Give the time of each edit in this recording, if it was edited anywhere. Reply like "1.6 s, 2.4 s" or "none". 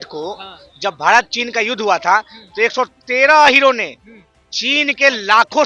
none